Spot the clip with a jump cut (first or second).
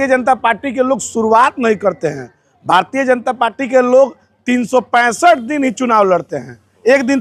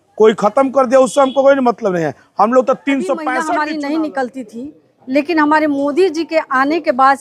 second